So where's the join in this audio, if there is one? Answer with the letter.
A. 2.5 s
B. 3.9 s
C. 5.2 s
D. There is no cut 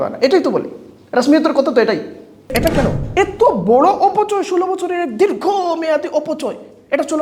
A